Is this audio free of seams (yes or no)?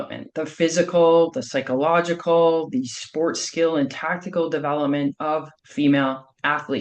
no